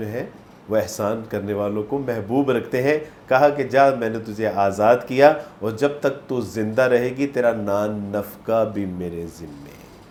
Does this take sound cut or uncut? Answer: uncut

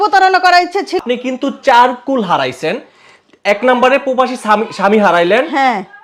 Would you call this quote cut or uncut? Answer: cut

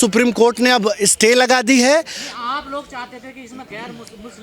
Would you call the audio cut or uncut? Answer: uncut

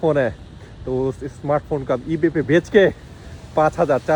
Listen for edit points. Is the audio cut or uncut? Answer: uncut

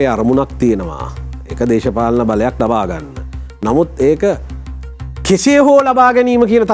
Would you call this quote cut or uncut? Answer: uncut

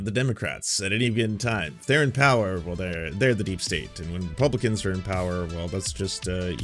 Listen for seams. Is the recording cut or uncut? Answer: uncut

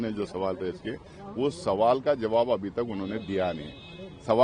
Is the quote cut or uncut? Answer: uncut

